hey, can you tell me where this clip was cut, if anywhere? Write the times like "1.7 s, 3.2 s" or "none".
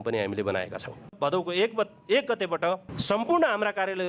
1.1 s, 2.9 s